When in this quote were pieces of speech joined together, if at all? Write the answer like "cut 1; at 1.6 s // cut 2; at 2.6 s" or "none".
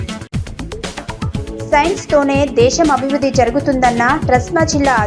none